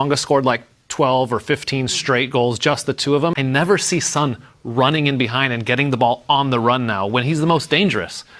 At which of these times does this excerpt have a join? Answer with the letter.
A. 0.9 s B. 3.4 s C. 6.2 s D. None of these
B